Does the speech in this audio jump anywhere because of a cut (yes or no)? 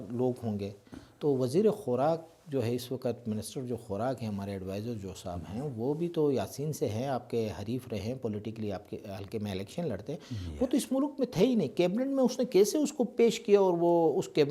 no